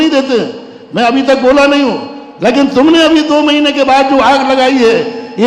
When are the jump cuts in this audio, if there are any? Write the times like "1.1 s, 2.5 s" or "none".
none